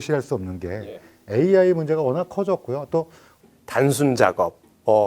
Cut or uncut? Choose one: cut